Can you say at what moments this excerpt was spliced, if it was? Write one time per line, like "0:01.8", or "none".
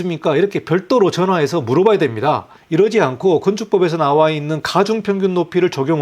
none